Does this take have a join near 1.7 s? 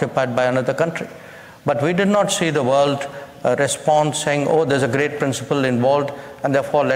no; 0 cuts

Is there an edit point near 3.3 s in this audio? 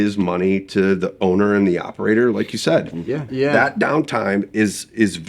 yes; 1 cut; at 3.3 s

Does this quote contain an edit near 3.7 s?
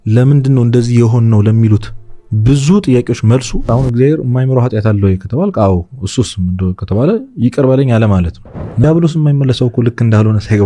yes; 2 cuts; at 3.7 s, 8.8 s

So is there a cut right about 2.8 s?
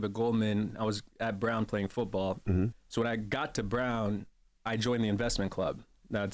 yes; 1 cut; at 2.8 s

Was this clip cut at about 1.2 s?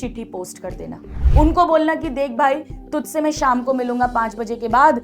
yes; 1 cut; at 1.2 s

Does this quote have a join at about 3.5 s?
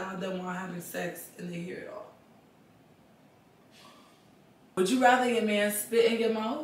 no; 1 cut; at 4.7 s

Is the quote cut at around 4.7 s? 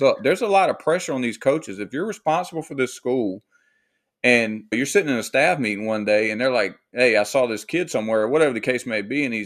yes; 1 cut; at 4.7 s

